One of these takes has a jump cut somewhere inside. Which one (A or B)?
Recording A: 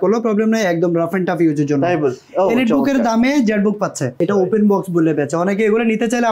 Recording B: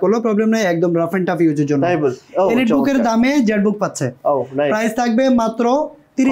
A